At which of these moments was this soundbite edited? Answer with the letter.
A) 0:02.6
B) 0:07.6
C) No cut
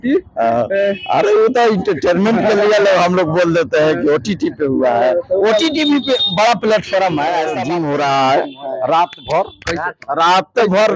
B